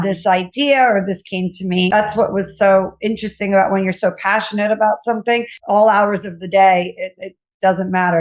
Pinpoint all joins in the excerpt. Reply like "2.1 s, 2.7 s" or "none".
1.9 s, 5.6 s